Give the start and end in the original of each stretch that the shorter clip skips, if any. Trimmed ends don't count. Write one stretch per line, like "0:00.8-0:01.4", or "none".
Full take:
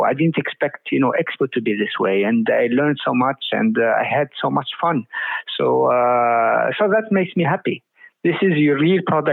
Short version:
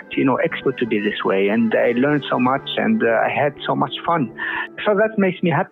0:05.5-0:06.7